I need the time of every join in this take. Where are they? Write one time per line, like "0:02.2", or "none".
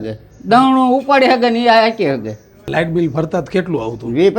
0:02.6